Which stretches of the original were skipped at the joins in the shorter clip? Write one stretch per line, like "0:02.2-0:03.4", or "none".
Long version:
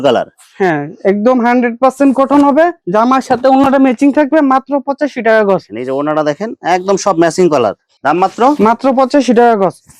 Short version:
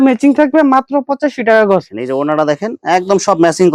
none